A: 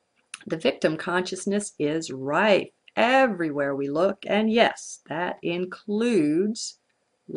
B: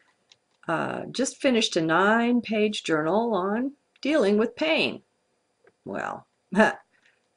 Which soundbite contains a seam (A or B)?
B